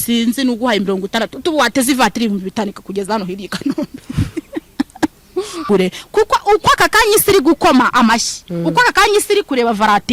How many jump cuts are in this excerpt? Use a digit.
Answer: 1